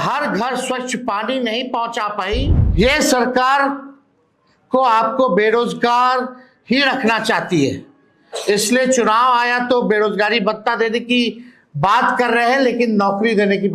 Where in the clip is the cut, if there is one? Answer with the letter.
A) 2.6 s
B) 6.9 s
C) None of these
A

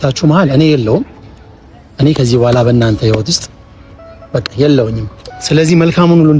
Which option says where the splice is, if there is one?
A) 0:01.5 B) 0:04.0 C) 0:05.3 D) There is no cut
C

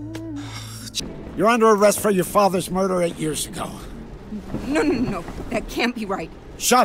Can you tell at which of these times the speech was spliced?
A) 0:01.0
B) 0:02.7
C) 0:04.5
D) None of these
A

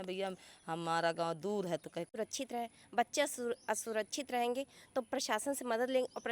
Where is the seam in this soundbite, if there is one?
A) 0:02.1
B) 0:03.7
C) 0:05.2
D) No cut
A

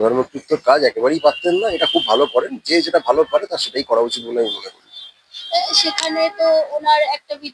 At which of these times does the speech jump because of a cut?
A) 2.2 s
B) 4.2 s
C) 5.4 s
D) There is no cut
D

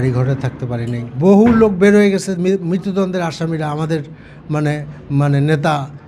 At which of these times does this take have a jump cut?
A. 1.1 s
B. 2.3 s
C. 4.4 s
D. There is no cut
A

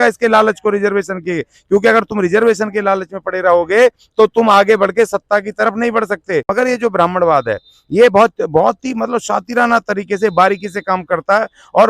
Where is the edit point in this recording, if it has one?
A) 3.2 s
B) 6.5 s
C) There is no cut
B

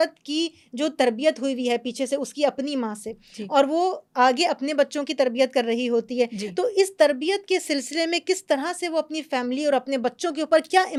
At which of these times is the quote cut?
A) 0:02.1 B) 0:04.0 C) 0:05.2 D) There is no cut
D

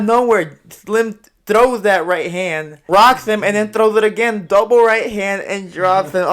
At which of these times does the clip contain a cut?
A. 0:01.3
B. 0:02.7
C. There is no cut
B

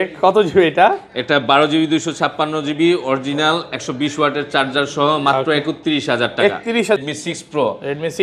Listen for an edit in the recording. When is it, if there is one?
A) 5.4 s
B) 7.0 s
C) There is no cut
B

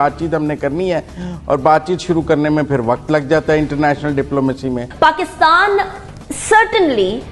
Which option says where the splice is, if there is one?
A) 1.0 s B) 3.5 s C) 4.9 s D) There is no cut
C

